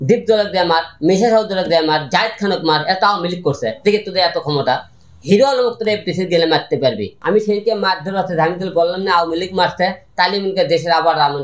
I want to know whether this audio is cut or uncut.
cut